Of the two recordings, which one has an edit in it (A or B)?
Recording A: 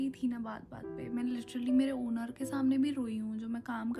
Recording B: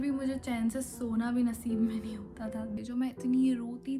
B